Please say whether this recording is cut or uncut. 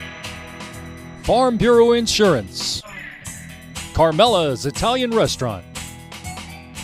cut